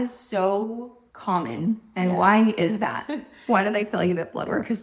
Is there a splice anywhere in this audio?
no; 0 cuts

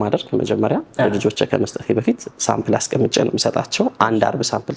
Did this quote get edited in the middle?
no; 0 cuts

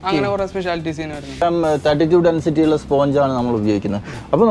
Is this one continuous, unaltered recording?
no; 1 cut; at 1.4 s

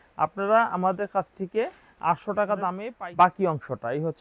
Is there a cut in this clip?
yes; 1 cut; at 2.8 s

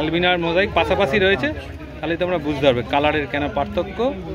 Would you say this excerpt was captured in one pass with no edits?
yes; 0 cuts

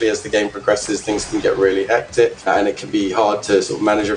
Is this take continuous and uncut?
no; 1 cut; at 2.4 s

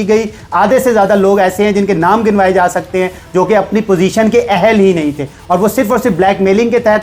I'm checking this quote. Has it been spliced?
no; 0 cuts

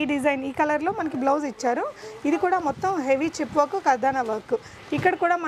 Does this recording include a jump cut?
no; 0 cuts

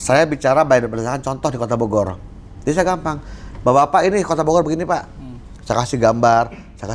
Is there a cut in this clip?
no; 0 cuts

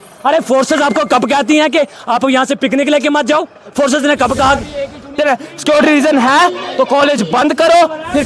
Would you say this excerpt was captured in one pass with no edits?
no; 1 cut; at 5.2 s

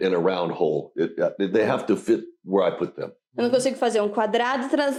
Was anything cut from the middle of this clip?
no; 0 cuts

